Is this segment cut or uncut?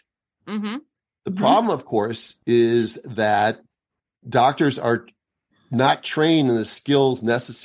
cut